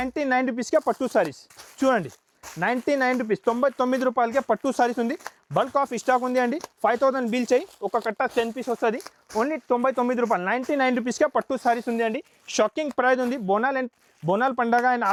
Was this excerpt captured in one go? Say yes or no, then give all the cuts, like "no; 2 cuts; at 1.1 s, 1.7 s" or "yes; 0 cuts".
yes; 0 cuts